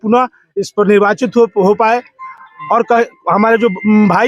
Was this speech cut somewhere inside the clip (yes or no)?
no